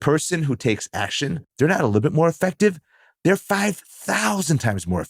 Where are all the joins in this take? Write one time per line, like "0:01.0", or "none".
0:01.4